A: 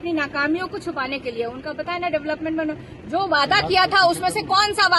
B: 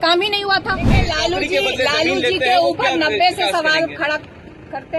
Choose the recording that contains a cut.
B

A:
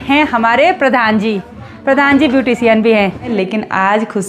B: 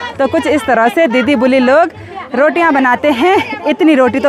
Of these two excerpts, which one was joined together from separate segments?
A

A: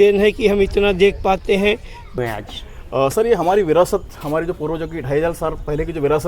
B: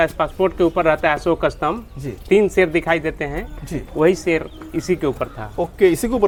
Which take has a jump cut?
A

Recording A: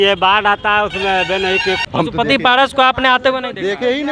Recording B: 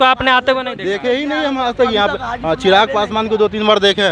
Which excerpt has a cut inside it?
A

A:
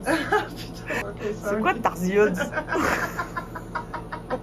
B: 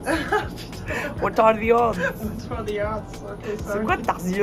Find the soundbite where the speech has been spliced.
A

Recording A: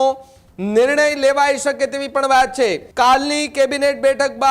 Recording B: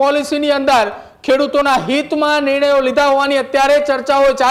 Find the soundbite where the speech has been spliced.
A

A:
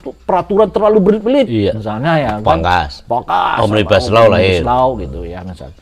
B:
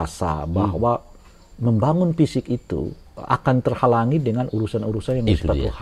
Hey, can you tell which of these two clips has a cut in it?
B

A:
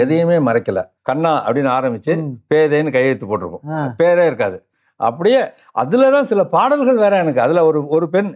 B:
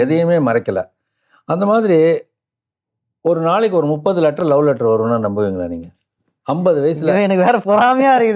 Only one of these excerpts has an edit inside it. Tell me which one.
A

